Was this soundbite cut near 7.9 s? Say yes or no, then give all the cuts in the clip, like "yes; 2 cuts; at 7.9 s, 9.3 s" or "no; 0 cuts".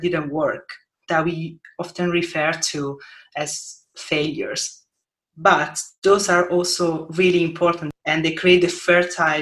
yes; 1 cut; at 7.9 s